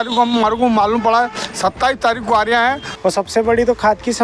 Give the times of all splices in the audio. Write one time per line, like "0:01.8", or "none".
0:02.9